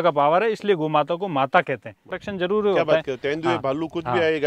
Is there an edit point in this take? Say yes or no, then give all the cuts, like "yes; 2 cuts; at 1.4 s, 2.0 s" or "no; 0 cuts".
yes; 1 cut; at 2.2 s